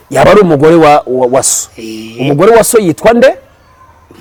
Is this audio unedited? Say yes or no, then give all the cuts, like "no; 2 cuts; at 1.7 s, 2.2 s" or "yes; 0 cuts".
yes; 0 cuts